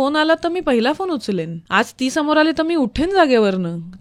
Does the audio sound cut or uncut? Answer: cut